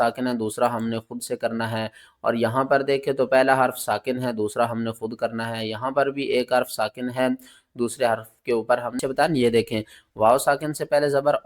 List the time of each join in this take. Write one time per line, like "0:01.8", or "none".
0:09.0